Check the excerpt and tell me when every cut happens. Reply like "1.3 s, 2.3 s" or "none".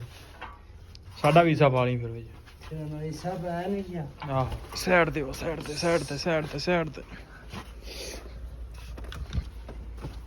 4.6 s